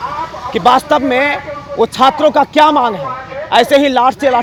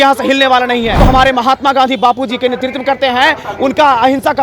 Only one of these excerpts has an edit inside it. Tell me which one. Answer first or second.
second